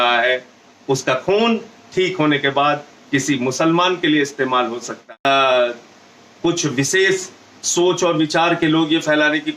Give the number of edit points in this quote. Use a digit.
1